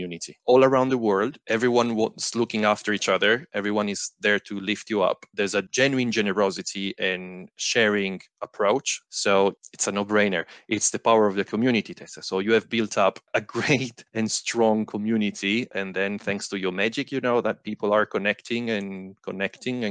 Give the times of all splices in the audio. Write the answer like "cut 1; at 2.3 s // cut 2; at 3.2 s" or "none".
none